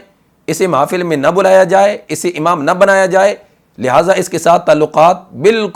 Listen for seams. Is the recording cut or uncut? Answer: uncut